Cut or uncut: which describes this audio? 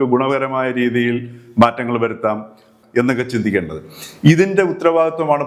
cut